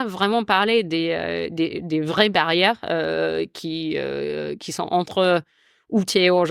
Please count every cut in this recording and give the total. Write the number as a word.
zero